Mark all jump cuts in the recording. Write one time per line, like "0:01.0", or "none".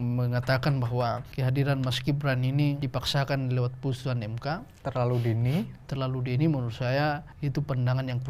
0:01.3
0:02.8
0:05.8
0:07.3